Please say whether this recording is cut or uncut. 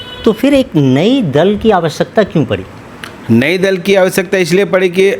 uncut